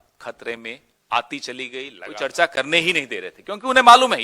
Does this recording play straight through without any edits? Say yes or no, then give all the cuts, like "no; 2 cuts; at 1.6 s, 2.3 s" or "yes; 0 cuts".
no; 1 cut; at 1.9 s